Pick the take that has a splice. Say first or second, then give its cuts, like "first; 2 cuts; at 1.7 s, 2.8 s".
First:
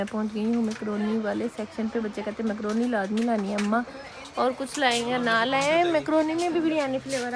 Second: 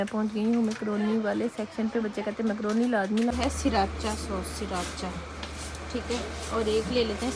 second; 1 cut; at 3.3 s